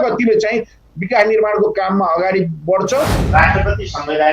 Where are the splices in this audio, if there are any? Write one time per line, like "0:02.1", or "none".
0:03.2